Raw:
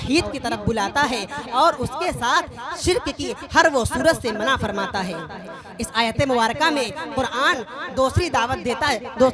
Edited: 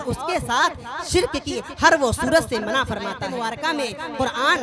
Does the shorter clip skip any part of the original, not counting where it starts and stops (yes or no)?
yes